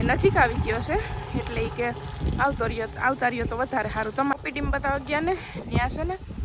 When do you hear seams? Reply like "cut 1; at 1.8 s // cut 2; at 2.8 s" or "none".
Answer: cut 1; at 4.3 s